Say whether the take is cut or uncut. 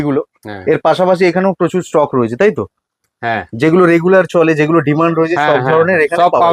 uncut